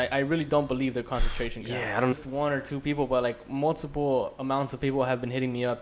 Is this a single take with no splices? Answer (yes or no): no